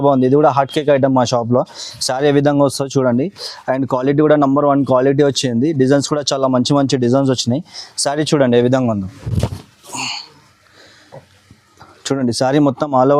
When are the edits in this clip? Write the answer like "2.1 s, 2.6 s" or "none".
none